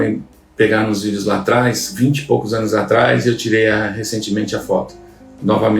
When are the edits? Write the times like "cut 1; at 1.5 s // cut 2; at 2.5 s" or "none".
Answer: cut 1; at 1.9 s